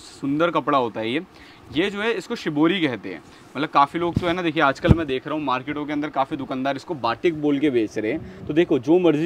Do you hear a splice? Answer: no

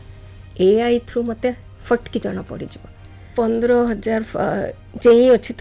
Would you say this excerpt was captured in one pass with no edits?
no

